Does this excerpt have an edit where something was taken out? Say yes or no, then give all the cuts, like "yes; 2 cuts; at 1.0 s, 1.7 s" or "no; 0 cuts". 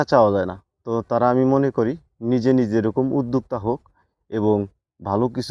no; 0 cuts